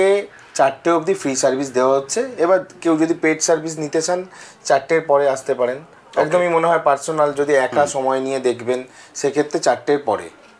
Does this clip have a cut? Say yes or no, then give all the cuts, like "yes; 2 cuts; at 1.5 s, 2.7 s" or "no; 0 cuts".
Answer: no; 0 cuts